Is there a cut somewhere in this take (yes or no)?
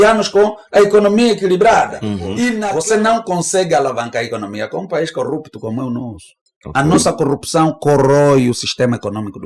yes